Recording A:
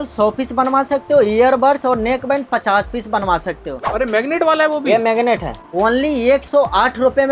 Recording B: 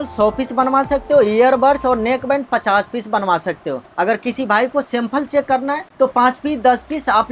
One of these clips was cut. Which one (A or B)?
A